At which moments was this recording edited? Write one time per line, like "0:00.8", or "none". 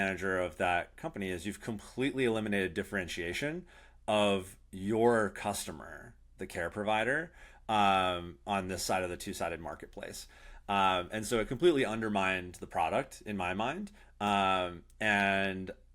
none